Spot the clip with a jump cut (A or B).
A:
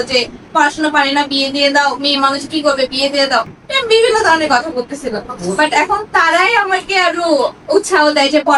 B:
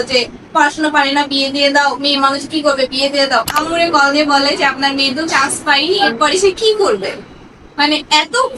B